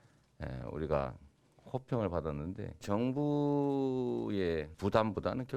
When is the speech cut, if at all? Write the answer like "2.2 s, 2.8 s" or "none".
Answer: 2.8 s, 4.7 s